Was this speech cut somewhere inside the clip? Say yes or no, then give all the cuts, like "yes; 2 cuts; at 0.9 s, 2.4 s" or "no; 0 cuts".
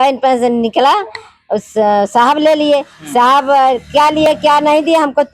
no; 0 cuts